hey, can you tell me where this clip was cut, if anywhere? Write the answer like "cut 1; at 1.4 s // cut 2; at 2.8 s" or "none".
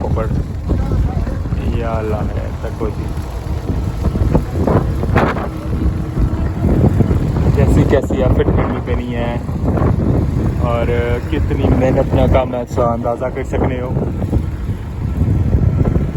none